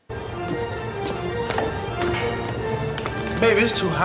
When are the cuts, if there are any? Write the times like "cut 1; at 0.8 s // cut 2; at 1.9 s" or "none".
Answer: none